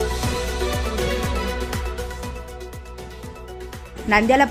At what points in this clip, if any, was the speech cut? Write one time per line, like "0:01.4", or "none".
0:03.3